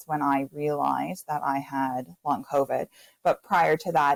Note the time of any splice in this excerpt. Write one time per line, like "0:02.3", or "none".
none